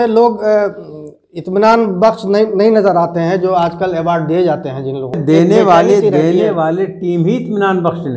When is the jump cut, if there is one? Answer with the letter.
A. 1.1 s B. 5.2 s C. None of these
B